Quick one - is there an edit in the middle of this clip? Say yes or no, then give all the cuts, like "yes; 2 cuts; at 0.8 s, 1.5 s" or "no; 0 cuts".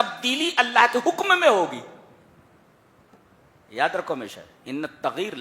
no; 0 cuts